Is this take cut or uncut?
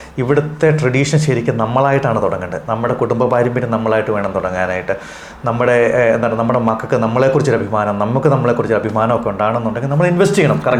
uncut